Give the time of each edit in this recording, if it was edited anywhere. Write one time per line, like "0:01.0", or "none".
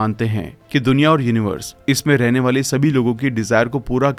none